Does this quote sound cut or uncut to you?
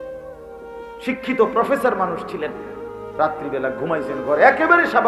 cut